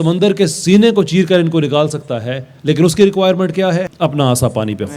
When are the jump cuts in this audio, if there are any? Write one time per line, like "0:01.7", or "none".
0:03.9